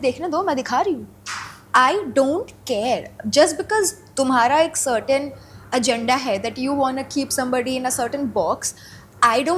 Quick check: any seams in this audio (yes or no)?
no